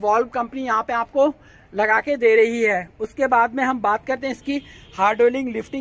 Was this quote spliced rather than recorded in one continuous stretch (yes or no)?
no